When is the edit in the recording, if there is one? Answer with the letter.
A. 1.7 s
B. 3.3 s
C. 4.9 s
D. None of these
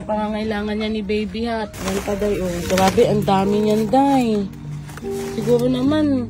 A